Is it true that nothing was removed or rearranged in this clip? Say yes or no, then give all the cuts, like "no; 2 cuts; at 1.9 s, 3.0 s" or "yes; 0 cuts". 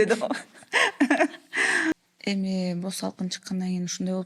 no; 1 cut; at 1.9 s